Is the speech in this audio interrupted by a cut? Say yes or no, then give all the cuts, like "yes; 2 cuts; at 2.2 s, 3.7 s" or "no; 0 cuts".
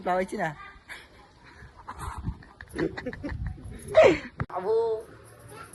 yes; 1 cut; at 4.4 s